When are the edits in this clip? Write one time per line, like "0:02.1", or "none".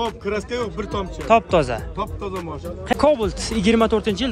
0:02.9